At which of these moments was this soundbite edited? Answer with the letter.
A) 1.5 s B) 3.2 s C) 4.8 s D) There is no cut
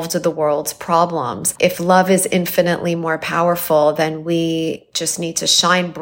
A